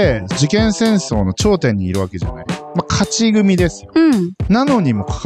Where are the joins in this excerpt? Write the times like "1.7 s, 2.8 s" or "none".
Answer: none

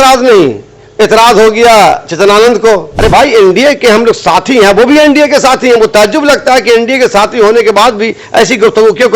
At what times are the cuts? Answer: 2.9 s

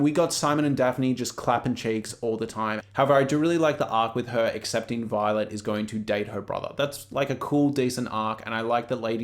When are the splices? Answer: 2.8 s

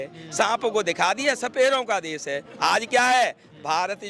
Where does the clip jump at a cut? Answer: none

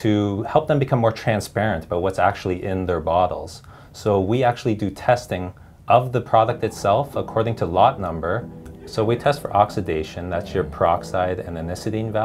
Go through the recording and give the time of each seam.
8.5 s

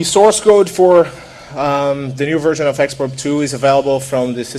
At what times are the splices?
1.7 s

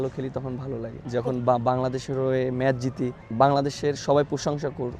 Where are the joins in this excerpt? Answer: 0.9 s, 3.2 s

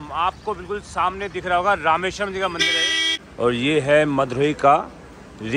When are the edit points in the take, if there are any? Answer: 3.2 s

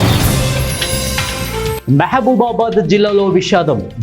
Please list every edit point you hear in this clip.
1.8 s

